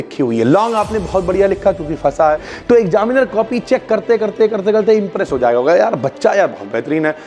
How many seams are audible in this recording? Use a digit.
1